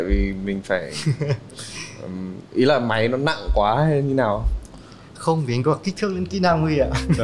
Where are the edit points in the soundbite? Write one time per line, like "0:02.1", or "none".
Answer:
none